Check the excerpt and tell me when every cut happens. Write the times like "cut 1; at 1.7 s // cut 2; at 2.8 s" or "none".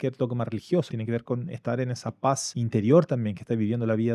cut 1; at 1.0 s // cut 2; at 2.5 s